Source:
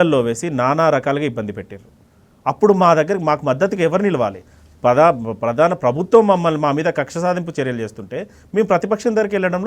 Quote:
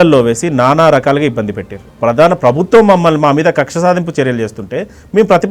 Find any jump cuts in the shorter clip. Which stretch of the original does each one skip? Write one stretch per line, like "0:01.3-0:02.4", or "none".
0:01.9-0:05.3